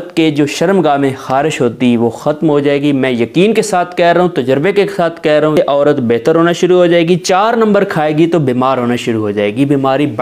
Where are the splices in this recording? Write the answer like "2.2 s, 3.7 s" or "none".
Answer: 5.6 s